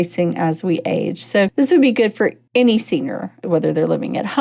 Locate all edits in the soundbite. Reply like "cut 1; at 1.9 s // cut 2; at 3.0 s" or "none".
cut 1; at 2.4 s // cut 2; at 3.4 s